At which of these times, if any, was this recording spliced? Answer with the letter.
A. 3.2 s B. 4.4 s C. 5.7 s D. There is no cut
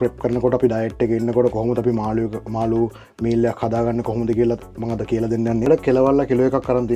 C